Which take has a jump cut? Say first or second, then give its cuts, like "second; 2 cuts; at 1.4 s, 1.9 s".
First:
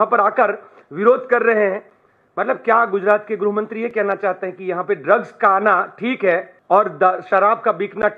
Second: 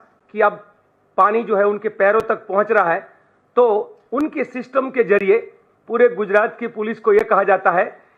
first; 1 cut; at 6.5 s